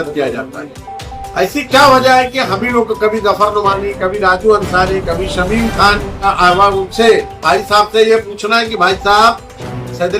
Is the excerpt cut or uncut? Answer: cut